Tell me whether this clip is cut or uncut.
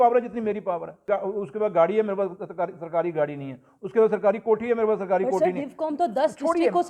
cut